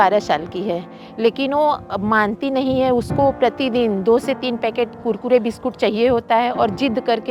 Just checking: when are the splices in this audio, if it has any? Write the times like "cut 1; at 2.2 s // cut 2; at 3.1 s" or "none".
none